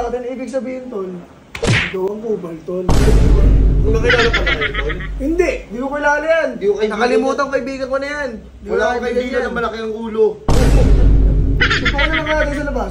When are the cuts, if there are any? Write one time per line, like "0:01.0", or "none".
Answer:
none

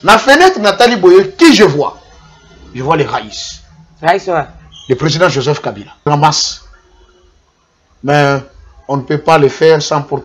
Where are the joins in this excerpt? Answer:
0:06.0

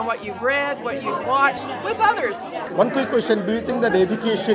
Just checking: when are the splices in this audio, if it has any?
0:02.6

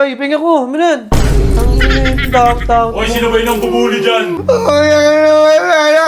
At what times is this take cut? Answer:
0:04.4

